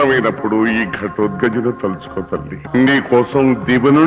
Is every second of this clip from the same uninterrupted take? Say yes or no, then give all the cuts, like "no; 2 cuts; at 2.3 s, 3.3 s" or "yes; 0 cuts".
no; 1 cut; at 2.6 s